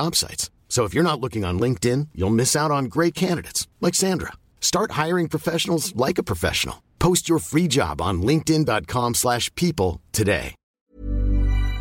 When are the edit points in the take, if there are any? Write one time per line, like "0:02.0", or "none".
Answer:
0:10.9